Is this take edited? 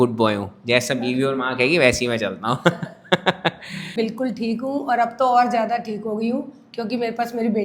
yes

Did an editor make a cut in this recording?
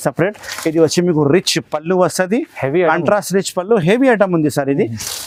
no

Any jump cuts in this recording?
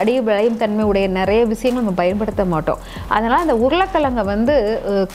no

